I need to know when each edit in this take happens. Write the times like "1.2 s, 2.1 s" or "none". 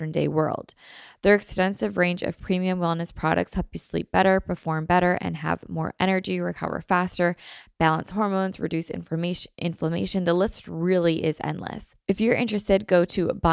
11.9 s

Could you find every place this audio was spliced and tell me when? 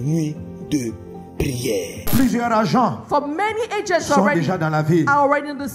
2.0 s

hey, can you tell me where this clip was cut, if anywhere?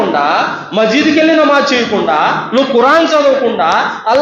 none

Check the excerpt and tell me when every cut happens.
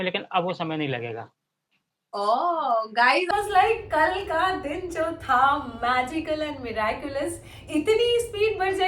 3.3 s

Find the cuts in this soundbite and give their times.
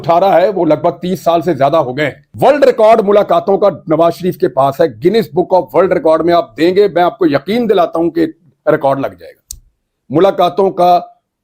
2.2 s

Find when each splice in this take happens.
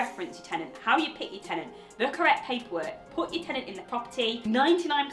none

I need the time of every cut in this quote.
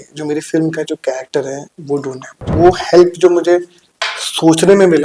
2.5 s

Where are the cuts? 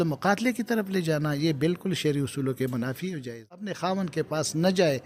3.7 s

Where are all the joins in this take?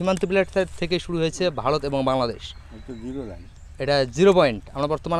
none

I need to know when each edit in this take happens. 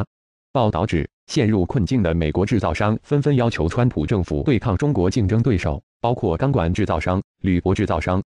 7.0 s

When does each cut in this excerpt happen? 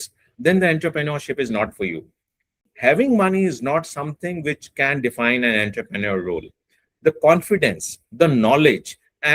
2.7 s

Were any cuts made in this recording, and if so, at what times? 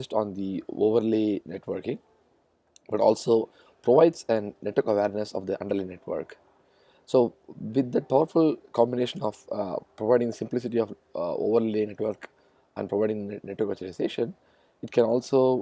none

